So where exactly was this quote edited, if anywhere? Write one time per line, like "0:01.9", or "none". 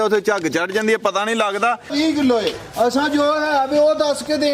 0:01.9

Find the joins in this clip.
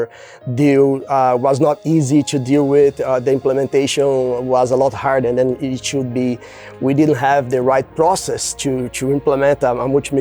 none

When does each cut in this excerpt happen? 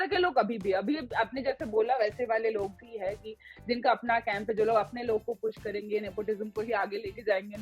none

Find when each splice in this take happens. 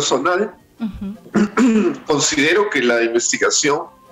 none

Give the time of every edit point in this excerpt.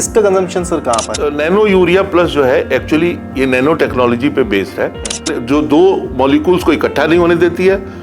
0:01.1
0:05.4

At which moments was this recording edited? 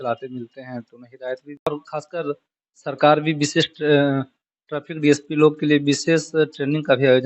0:01.7

